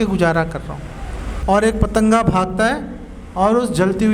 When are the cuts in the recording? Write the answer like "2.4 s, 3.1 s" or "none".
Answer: 1.3 s